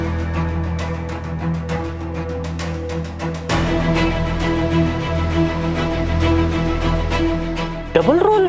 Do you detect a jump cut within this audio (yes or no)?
no